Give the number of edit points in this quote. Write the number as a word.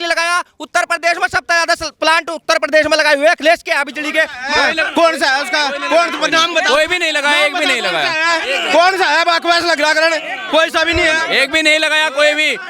zero